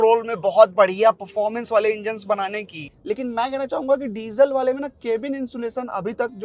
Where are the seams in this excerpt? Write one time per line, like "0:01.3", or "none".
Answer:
0:02.9